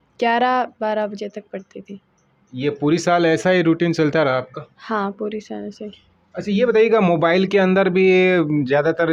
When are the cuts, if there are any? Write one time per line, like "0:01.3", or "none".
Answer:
none